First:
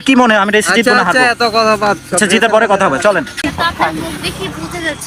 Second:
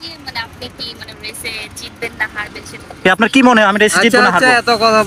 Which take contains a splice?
first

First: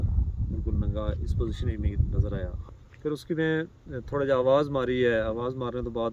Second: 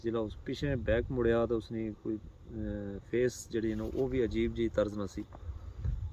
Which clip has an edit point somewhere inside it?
first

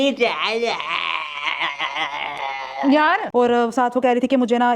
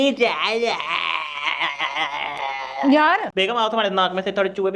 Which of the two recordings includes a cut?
first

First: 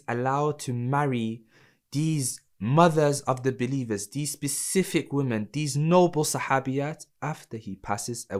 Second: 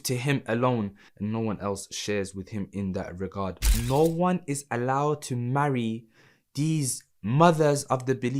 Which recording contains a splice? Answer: second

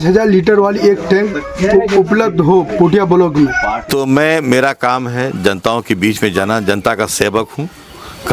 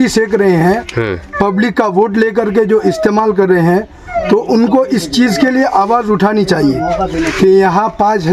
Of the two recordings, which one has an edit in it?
first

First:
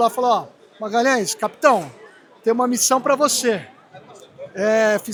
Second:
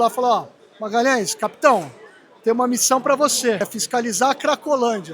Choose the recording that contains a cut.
second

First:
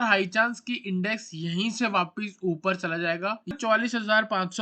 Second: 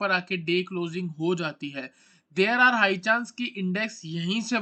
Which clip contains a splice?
first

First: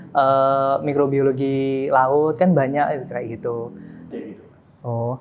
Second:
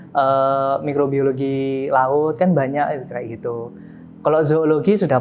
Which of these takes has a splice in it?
first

